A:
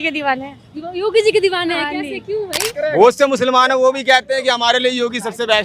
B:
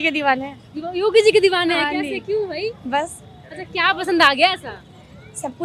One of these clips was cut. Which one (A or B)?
A